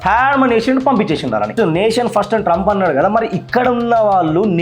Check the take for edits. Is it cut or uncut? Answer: cut